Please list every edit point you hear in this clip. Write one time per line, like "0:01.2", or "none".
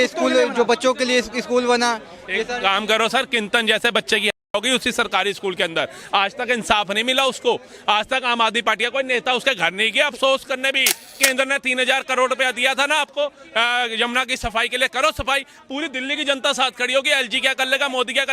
0:11.2